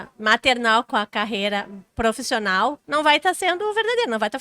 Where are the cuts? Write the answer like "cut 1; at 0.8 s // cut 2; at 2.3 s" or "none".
cut 1; at 1.8 s // cut 2; at 2.8 s